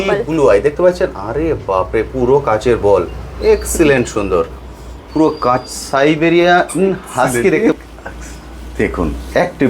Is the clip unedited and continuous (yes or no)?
no